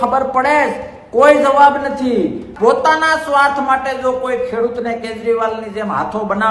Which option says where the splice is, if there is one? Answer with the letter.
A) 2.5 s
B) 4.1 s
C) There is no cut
A